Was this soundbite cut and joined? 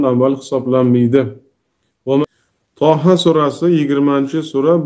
yes; 1 cut; at 2.2 s

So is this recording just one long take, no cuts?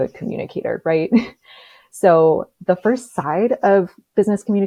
yes; 0 cuts

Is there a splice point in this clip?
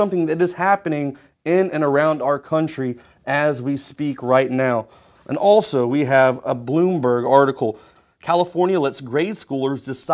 no; 0 cuts

